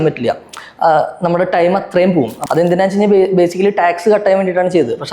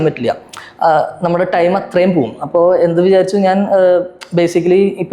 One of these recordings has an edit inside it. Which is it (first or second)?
first